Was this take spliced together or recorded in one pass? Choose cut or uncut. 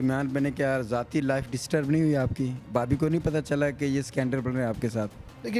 uncut